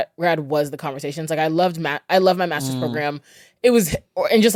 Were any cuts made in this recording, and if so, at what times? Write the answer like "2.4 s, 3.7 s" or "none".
none